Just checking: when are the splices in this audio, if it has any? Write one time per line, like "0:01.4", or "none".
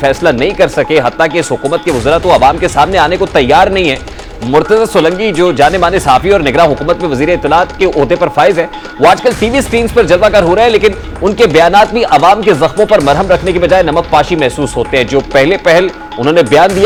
none